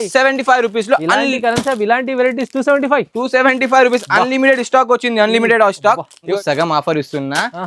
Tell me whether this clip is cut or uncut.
cut